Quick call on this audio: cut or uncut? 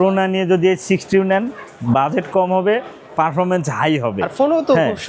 uncut